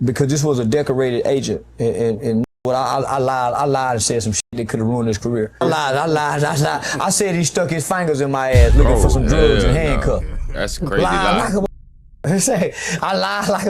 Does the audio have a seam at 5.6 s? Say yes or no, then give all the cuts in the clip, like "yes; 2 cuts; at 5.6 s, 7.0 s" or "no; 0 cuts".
yes; 1 cut; at 5.6 s